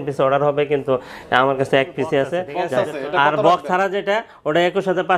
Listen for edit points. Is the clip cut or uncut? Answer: cut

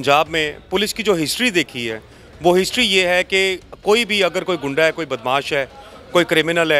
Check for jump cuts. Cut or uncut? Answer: uncut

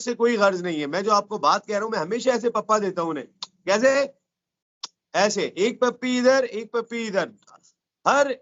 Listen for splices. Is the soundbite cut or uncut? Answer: uncut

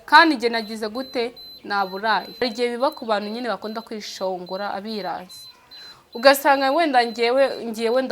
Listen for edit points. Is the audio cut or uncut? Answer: cut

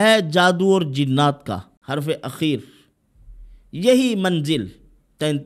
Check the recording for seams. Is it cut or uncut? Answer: cut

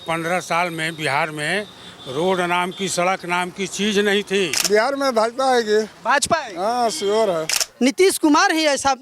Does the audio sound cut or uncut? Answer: cut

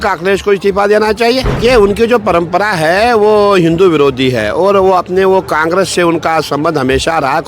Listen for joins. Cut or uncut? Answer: cut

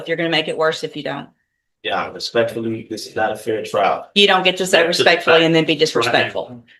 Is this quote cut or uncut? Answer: uncut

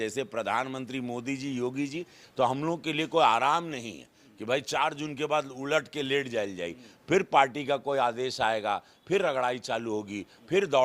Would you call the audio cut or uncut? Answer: cut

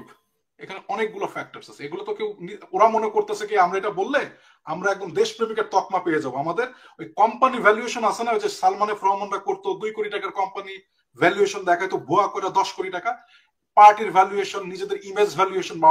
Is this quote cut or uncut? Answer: uncut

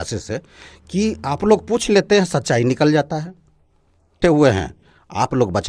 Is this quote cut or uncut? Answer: cut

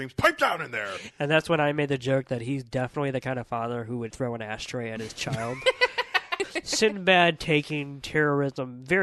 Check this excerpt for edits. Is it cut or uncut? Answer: cut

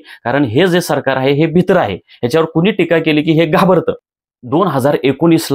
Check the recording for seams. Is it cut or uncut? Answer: cut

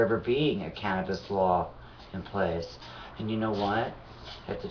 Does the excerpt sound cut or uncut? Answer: uncut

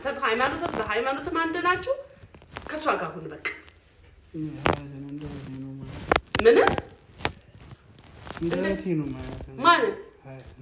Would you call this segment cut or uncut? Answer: uncut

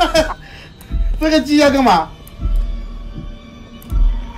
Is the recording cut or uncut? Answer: uncut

